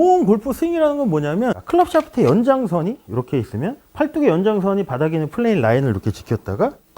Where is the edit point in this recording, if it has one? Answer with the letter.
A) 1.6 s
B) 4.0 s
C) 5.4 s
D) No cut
A